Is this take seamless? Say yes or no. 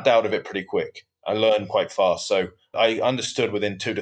no